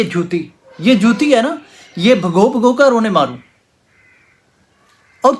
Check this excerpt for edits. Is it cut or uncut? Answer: uncut